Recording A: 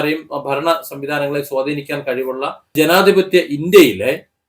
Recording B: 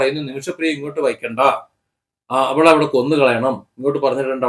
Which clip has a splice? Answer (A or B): A